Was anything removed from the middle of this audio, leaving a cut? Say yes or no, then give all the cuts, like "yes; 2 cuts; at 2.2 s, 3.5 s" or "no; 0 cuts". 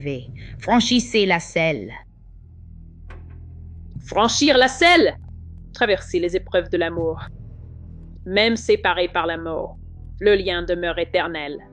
no; 0 cuts